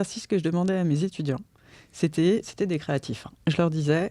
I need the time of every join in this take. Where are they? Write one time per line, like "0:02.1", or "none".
none